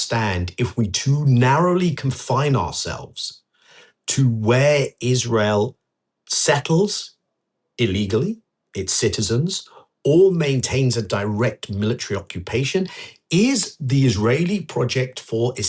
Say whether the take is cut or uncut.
uncut